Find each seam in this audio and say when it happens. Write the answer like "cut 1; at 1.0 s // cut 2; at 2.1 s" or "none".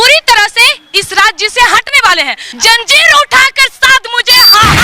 cut 1; at 2.4 s